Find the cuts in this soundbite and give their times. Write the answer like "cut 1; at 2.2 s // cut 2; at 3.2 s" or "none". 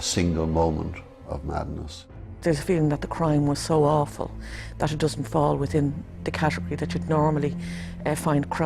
cut 1; at 2.4 s